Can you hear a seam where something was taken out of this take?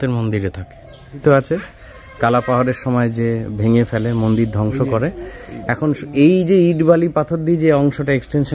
yes; 1 cut; at 1.2 s

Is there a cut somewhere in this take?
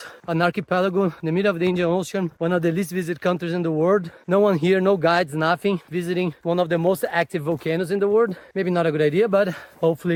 no; 0 cuts

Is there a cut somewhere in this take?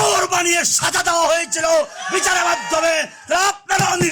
no; 0 cuts

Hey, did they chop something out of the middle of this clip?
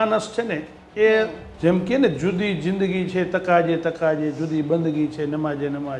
yes; 1 cut; at 1.4 s

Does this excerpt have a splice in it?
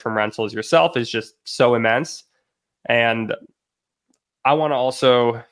no; 0 cuts

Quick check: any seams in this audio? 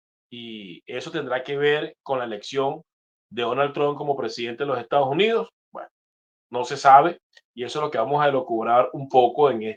no; 0 cuts

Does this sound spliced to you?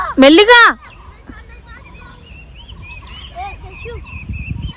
no; 0 cuts

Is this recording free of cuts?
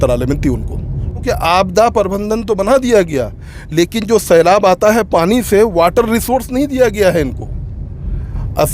no; 1 cut; at 1.2 s

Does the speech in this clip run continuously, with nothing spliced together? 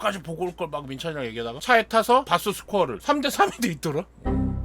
no; 1 cut; at 2.3 s

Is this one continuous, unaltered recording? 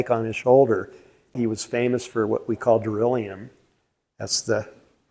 no; 1 cut; at 1.3 s

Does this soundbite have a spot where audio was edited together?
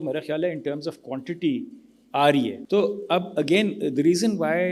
yes; 1 cut; at 2.6 s

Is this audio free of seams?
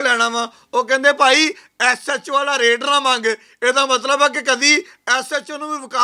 yes; 0 cuts

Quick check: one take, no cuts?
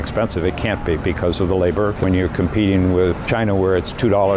no; 2 cuts; at 1.9 s, 3.2 s

